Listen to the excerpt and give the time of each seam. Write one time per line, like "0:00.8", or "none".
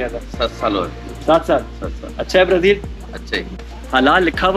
0:03.4